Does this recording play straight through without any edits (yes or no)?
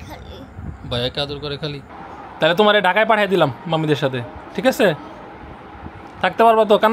no